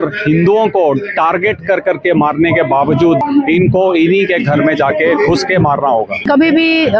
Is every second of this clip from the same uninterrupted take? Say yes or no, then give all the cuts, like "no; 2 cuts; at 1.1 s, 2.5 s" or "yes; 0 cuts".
no; 2 cuts; at 3.2 s, 6.3 s